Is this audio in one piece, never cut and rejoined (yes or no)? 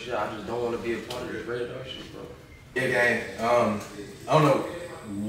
no